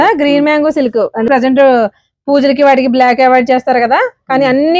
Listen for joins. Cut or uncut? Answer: cut